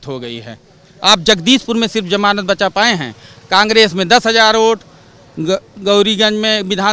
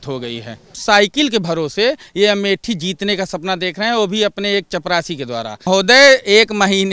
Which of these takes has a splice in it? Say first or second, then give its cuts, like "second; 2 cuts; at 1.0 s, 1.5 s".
second; 2 cuts; at 0.8 s, 5.7 s